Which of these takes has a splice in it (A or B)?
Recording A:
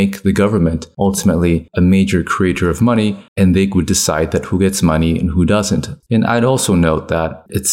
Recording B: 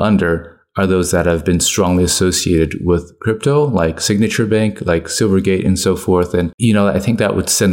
A